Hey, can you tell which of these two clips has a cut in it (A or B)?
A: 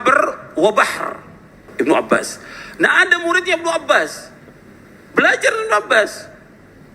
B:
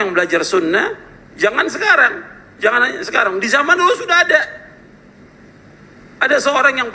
A